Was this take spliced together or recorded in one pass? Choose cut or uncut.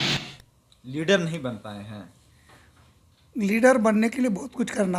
uncut